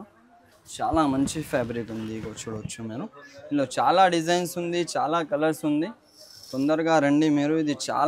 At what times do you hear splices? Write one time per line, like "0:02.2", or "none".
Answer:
none